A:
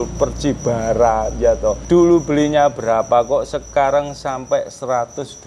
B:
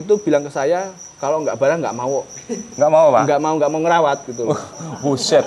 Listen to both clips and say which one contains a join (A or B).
A